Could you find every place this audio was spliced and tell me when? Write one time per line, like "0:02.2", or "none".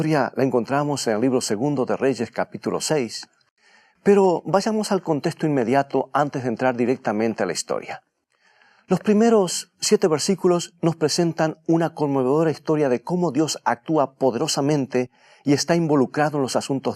0:13.6